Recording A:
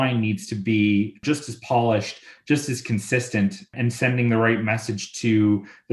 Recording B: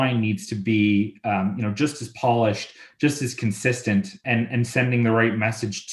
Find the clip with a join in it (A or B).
A